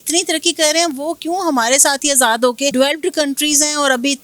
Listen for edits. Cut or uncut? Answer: cut